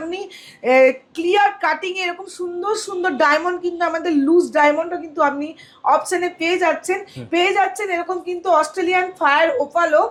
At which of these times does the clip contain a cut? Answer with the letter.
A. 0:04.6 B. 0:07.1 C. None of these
C